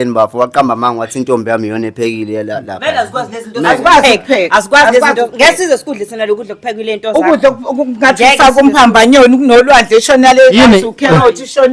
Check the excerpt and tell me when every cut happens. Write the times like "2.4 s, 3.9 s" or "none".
none